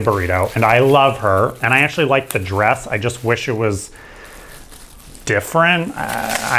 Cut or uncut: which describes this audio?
uncut